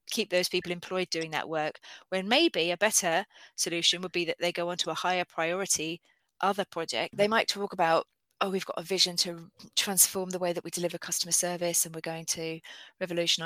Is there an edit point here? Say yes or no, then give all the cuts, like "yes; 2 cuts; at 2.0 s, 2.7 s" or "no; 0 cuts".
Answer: yes; 1 cut; at 7.1 s